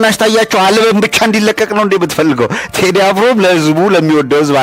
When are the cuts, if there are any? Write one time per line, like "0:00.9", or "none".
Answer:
none